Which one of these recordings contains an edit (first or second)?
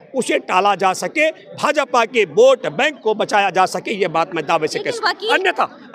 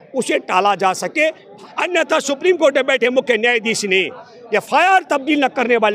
second